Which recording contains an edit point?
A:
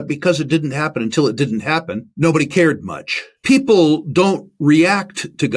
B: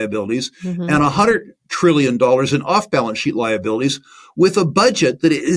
A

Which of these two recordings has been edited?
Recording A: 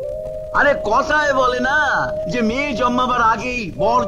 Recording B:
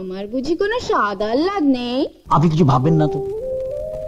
B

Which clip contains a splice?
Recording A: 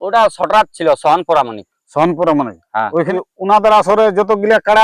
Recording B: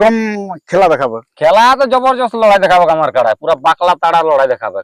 A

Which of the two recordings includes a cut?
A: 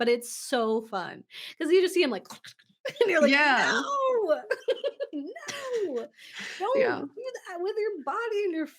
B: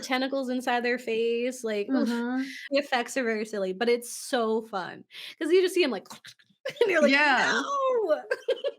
B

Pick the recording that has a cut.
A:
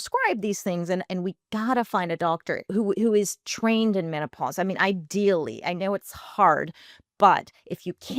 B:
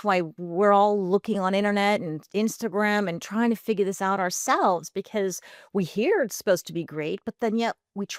A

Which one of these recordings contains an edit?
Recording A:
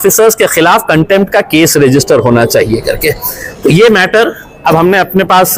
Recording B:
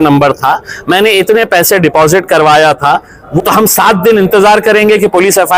B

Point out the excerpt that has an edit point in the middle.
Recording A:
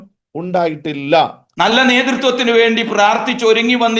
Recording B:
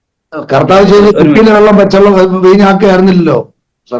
A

